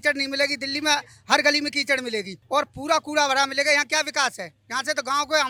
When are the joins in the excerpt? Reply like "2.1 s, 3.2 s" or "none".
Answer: none

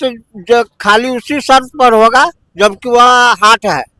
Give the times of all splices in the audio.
none

